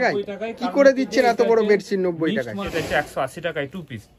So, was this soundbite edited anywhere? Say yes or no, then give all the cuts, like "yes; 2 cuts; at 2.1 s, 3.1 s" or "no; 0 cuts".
yes; 1 cut; at 2.6 s